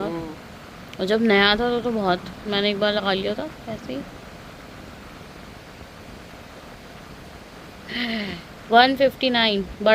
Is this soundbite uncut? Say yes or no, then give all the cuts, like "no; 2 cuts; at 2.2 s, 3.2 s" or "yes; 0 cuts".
yes; 0 cuts